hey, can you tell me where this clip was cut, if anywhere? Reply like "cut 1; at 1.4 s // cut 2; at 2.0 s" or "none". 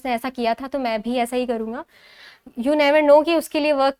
none